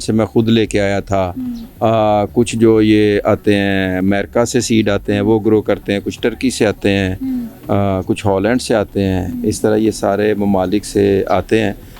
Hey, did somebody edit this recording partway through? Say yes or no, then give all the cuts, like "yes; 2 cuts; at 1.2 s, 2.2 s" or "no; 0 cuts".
no; 0 cuts